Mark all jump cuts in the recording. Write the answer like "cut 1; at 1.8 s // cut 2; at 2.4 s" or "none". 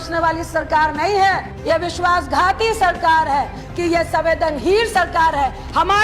cut 1; at 1.5 s // cut 2; at 3.6 s